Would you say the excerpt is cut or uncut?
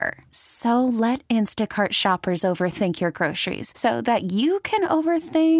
uncut